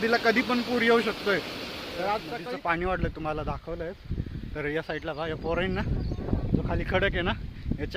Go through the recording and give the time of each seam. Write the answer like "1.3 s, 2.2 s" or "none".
2.3 s

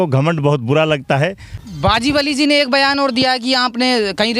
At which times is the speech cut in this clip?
1.0 s

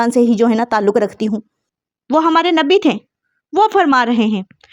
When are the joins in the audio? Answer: 1.6 s

